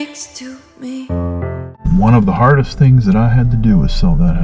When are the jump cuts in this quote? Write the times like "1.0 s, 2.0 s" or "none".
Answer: 1.6 s